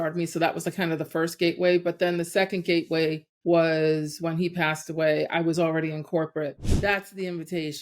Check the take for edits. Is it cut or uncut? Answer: cut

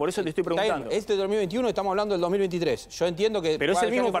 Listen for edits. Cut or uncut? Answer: uncut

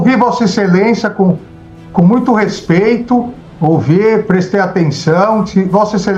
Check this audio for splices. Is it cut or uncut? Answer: uncut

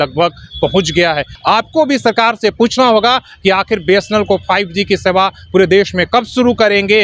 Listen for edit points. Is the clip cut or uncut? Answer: cut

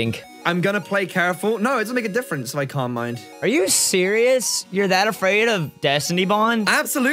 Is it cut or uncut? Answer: cut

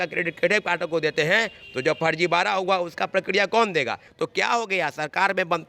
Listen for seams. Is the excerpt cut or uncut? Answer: cut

